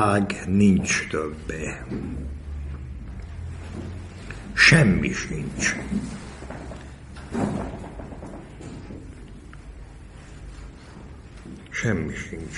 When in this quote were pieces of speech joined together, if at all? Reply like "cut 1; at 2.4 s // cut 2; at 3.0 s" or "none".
none